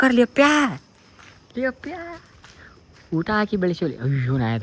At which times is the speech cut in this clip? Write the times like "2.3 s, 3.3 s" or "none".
none